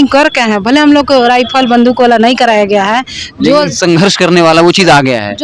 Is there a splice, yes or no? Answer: no